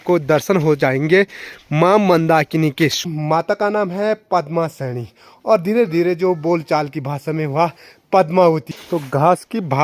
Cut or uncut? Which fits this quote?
cut